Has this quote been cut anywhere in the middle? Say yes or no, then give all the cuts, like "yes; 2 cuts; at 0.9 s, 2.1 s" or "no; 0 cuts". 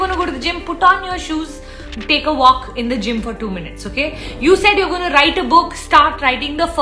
no; 0 cuts